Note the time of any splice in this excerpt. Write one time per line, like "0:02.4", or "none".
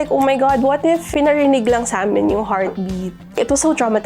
0:01.1